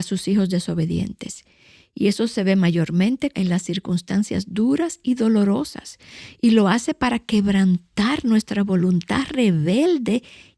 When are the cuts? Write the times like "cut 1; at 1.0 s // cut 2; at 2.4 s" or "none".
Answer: cut 1; at 3.3 s